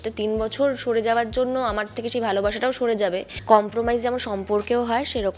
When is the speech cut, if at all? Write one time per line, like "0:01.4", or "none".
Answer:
0:03.3